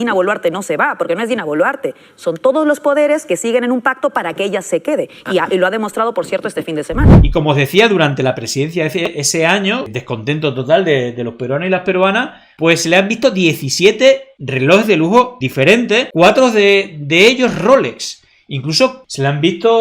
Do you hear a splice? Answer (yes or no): yes